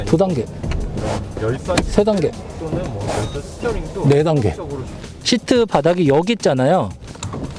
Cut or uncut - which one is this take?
cut